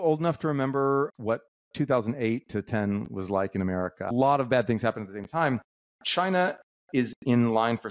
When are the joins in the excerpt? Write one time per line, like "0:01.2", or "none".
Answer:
0:01.1
0:04.1